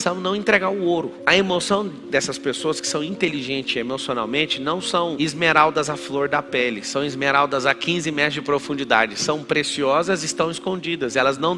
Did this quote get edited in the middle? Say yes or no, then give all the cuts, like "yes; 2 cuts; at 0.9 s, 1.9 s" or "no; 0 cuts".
no; 0 cuts